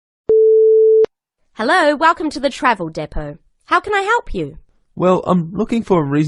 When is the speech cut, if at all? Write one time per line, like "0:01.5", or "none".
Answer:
0:01.0